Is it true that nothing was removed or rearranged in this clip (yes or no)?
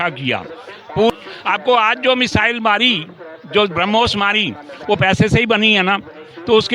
no